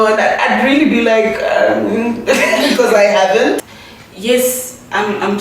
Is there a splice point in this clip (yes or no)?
yes